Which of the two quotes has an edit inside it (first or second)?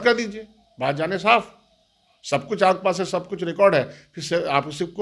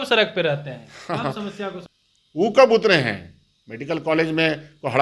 second